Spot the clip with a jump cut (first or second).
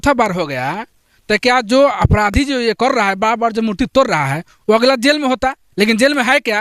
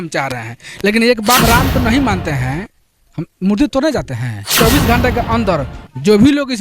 second